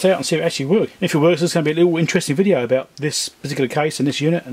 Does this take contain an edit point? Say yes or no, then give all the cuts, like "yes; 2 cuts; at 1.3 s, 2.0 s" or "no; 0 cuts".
yes; 1 cut; at 0.9 s